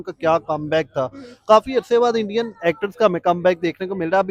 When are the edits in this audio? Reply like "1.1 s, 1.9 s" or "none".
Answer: none